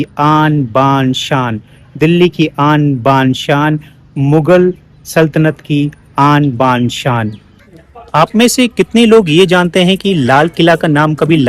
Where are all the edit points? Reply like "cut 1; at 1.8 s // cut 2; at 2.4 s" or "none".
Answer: cut 1; at 7.7 s